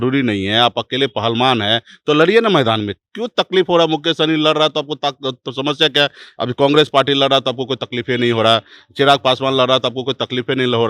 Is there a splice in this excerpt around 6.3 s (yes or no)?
no